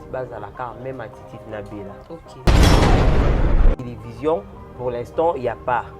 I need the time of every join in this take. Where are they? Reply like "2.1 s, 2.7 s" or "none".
2.3 s, 3.9 s